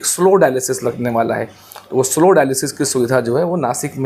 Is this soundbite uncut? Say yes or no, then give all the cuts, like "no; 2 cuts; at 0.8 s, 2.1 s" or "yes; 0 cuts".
yes; 0 cuts